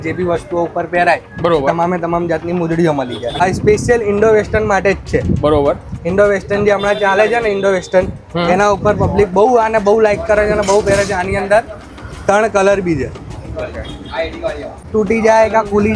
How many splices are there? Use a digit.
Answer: 2